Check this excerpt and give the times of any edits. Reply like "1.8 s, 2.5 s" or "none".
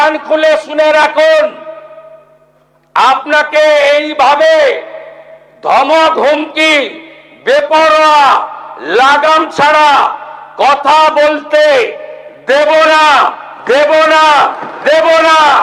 none